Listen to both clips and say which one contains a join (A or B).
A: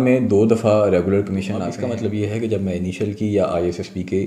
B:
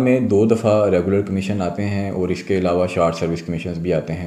A